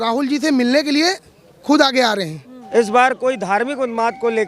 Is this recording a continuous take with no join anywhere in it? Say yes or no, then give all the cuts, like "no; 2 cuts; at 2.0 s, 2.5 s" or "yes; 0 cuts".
no; 1 cut; at 2.6 s